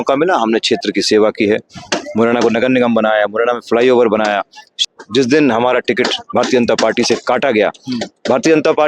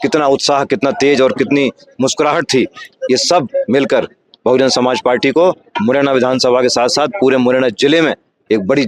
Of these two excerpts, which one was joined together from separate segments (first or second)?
first